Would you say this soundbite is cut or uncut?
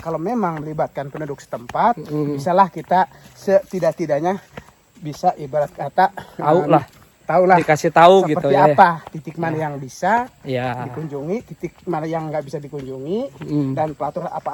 uncut